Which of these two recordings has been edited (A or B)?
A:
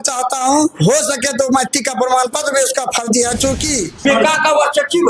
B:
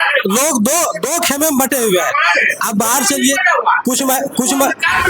A